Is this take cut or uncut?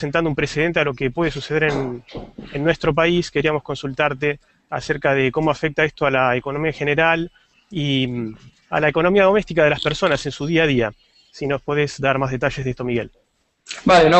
cut